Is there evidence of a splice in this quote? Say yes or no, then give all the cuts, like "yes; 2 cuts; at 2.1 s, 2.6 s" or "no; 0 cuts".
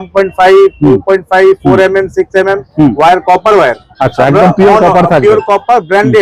no; 0 cuts